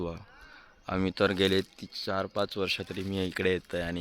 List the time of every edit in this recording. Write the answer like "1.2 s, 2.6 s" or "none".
none